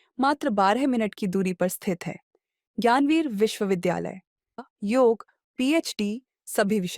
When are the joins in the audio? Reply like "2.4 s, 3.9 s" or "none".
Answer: 4.6 s